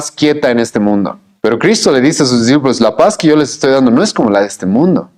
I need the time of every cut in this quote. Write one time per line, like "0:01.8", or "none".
0:01.2